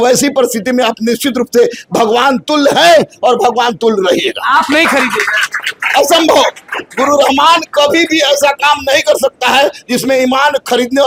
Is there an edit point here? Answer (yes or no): no